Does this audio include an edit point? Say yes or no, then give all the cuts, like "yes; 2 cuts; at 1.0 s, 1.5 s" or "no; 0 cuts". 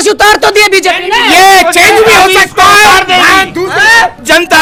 no; 0 cuts